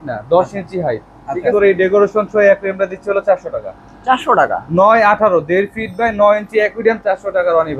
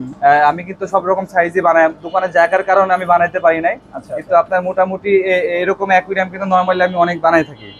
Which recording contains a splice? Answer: first; 1 cut; at 1.5 s

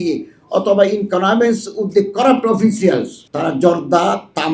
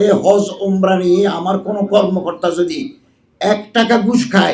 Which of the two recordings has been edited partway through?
first; 1 cut; at 3.2 s

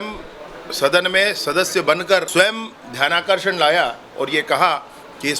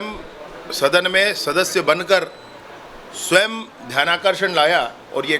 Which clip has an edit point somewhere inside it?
first; 1 cut; at 2.3 s

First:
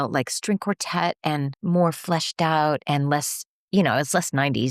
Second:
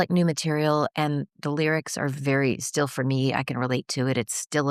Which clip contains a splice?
first; 1 cut; at 1.5 s

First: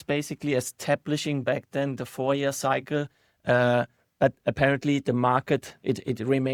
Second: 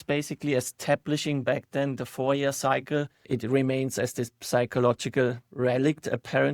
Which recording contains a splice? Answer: second; 1 cut; at 3.3 s

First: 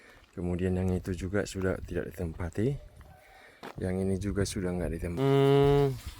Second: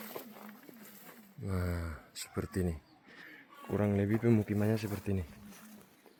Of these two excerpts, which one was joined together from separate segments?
first; 1 cut; at 5.1 s

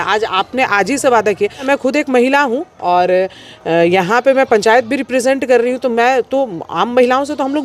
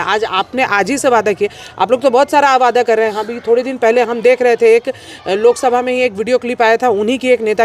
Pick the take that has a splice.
first; 1 cut; at 1.6 s

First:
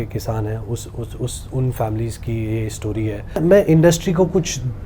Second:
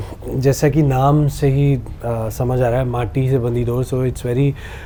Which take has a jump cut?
first; 1 cut; at 3.4 s

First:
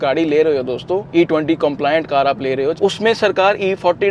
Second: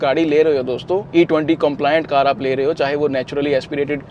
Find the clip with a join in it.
first; 1 cut; at 2.8 s

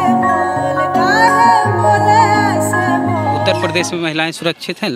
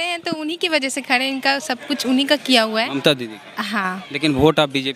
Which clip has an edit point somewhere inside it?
first; 1 cut; at 3.4 s

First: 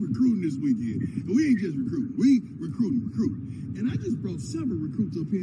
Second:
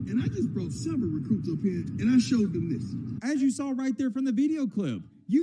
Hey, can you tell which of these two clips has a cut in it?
second; 1 cut; at 3.1 s

